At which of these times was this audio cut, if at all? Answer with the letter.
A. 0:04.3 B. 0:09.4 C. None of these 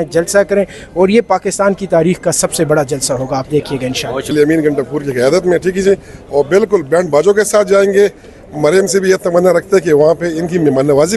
A